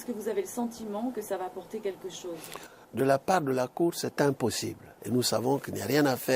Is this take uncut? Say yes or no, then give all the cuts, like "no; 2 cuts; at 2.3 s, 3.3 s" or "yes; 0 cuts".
no; 1 cut; at 5.0 s